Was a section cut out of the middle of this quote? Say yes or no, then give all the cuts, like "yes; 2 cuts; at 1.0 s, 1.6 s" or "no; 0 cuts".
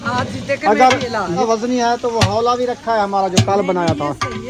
yes; 1 cut; at 1.4 s